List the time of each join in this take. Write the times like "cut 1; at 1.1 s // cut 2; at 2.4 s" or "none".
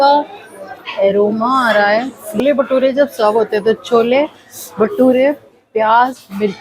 cut 1; at 2.4 s